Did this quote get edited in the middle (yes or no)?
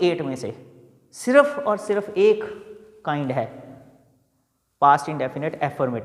no